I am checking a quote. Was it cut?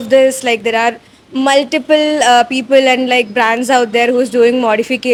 no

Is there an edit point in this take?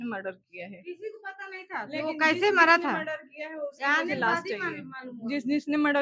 no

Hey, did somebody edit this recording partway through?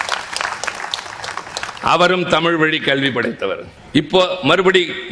yes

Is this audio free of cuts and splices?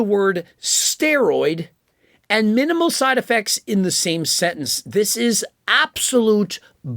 yes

